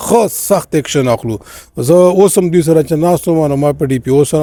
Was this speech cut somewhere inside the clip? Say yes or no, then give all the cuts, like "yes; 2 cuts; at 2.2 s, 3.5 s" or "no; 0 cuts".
no; 0 cuts